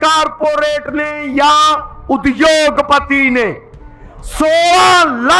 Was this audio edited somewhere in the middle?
no; 0 cuts

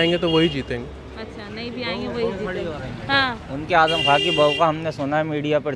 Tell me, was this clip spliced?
no; 0 cuts

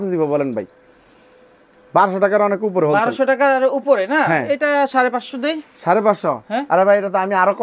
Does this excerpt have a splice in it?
no; 0 cuts

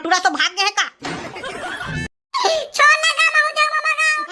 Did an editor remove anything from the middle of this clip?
yes; 1 cut; at 1.9 s

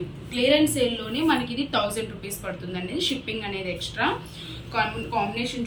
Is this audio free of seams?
yes; 0 cuts

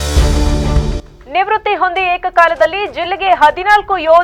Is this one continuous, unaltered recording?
yes; 0 cuts

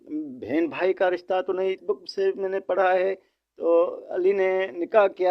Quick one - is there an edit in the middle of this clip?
yes; 1 cut; at 1.8 s

